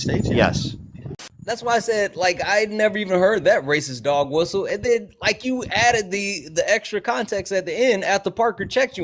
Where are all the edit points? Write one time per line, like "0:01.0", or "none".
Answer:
0:01.0